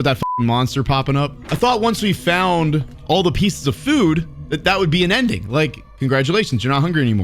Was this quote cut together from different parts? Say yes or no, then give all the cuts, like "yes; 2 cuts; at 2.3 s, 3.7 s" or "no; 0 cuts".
yes; 2 cuts; at 1.4 s, 2.9 s